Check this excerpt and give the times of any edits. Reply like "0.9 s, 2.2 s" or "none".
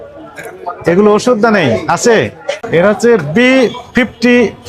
2.5 s

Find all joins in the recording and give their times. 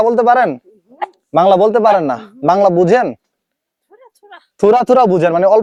none

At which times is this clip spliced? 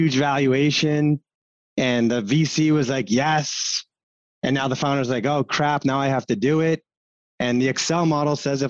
none

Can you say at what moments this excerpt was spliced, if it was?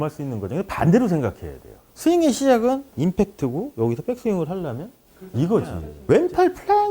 5.9 s

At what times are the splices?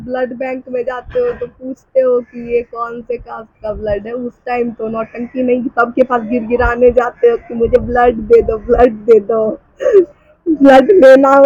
none

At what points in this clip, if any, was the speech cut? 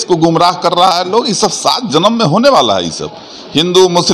none

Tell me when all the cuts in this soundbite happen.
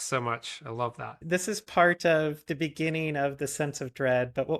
1.1 s

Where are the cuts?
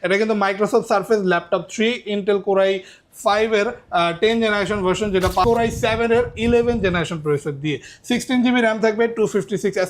5.4 s

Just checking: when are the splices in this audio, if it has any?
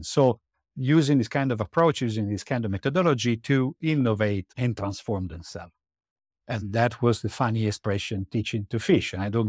4.5 s

